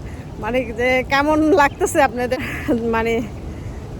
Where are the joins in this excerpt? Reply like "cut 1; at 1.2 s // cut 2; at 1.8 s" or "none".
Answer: cut 1; at 2.4 s